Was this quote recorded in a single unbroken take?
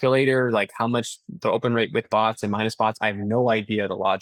yes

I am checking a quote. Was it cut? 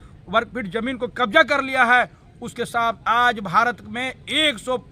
no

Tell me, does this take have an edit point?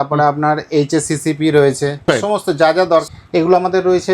yes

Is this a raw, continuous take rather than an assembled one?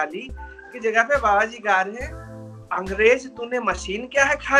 yes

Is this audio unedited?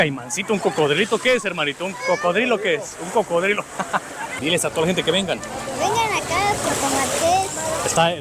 no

